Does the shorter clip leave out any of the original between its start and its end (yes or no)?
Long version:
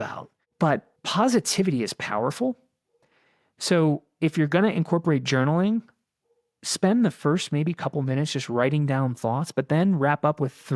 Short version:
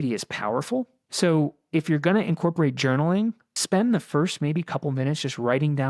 yes